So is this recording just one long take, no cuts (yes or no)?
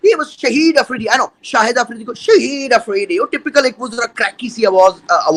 yes